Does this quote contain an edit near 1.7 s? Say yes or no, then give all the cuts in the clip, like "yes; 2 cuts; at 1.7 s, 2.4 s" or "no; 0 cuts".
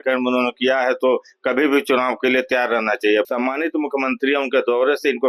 no; 1 cut; at 3.3 s